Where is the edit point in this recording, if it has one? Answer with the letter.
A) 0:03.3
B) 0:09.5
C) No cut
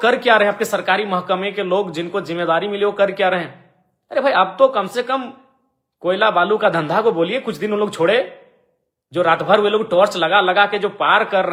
C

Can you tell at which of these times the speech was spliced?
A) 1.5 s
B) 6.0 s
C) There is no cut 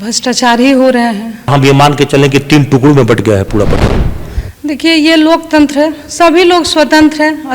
A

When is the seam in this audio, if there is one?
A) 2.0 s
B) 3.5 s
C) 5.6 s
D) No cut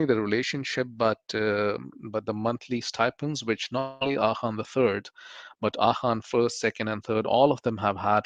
D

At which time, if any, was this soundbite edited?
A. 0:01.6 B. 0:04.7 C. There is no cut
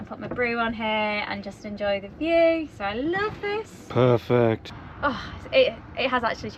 B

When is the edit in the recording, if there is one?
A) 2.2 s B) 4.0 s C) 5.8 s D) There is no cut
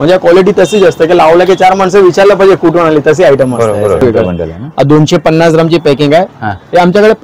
B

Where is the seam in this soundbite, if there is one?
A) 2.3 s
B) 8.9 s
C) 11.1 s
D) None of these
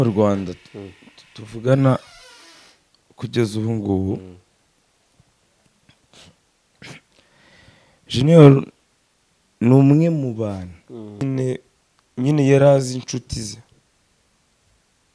C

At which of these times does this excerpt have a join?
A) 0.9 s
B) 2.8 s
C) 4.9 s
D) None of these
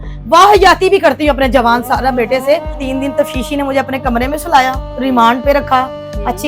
B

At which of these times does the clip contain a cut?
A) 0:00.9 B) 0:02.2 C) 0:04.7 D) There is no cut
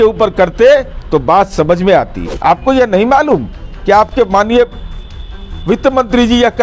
B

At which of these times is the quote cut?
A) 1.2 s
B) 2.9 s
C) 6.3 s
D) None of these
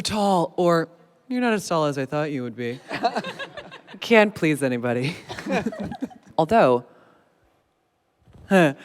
C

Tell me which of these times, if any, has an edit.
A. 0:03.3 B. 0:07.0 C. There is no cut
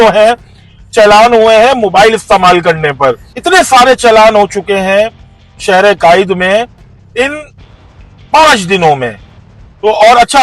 A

